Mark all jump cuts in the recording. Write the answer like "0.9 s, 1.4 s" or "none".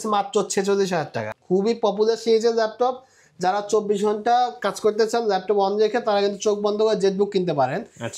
1.2 s